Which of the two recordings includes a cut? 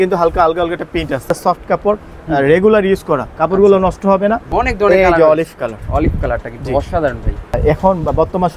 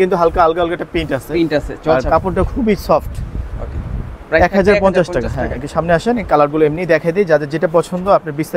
first; 3 cuts; at 1.3 s, 4.4 s, 7.6 s

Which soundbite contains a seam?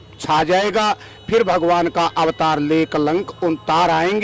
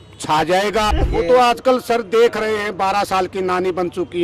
second; 1 cut; at 1.0 s

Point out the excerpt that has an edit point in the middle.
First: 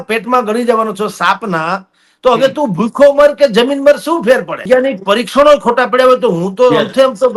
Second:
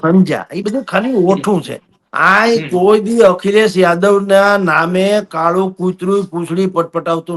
first; 1 cut; at 4.6 s

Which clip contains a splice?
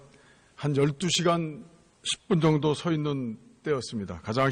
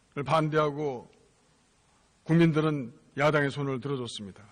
second; 1 cut; at 2.3 s

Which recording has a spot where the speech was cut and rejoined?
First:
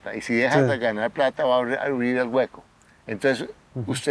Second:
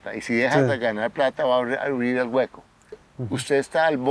second; 1 cut; at 3.0 s

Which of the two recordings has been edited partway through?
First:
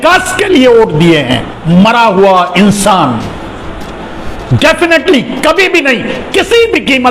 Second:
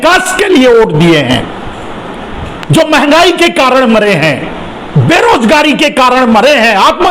first; 1 cut; at 1.5 s

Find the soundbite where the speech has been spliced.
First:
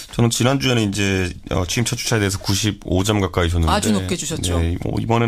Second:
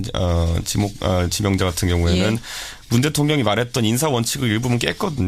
second; 1 cut; at 4.0 s

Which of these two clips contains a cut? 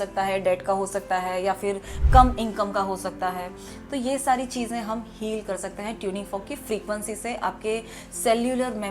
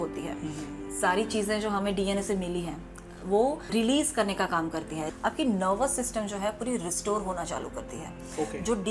second; 2 cuts; at 3.7 s, 5.0 s

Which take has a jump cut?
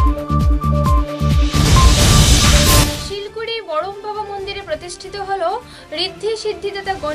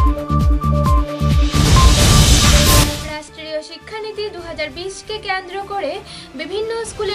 first; 1 cut; at 3.0 s

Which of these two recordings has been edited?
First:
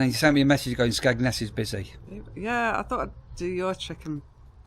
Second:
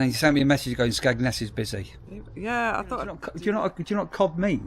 second; 1 cut; at 3.3 s

